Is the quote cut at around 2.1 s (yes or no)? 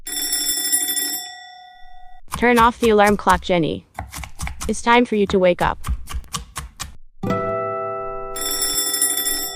yes